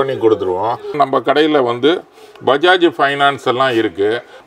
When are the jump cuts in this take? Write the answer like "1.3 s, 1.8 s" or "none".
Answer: 0.9 s